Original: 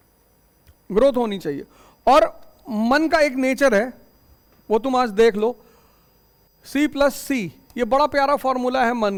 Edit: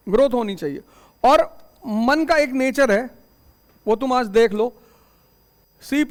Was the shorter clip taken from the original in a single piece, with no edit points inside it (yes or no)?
yes